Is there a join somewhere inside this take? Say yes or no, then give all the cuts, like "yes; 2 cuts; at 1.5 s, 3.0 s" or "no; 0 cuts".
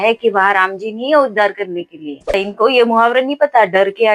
yes; 1 cut; at 2.3 s